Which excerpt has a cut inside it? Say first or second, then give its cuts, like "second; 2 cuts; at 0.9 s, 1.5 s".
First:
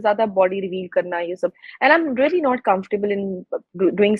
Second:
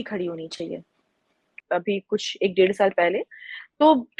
second; 1 cut; at 1.6 s